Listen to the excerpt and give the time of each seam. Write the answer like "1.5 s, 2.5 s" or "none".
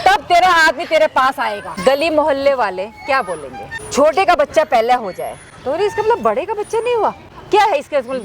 1.7 s, 3.8 s